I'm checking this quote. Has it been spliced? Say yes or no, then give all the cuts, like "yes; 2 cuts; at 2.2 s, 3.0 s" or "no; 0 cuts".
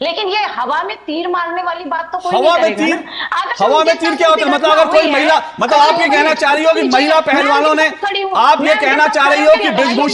no; 0 cuts